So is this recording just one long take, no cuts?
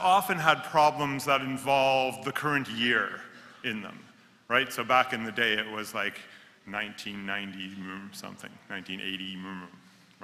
yes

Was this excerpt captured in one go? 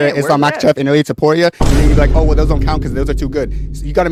yes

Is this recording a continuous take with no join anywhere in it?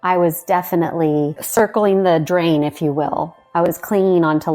no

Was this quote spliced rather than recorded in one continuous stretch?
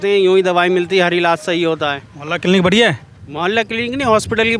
no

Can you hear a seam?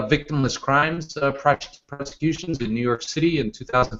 no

